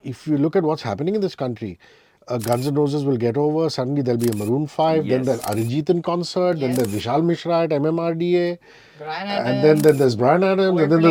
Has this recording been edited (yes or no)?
no